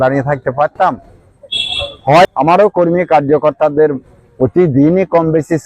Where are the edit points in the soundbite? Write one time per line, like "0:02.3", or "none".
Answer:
0:02.2